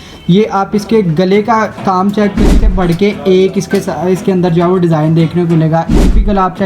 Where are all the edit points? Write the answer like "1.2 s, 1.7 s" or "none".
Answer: 2.5 s

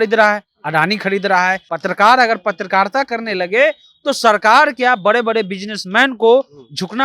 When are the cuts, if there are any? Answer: 1.7 s

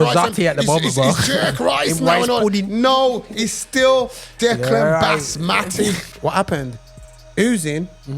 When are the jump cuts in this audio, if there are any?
6.1 s

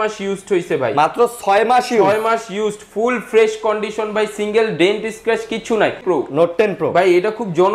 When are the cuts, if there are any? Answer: 6.0 s

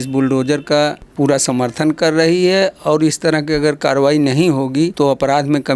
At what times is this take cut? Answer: 1.0 s, 4.9 s

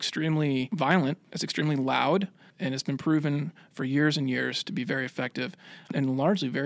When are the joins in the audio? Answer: 1.0 s, 2.4 s, 5.9 s

